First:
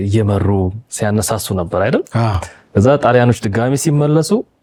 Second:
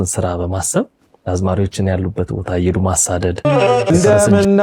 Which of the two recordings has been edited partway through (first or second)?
second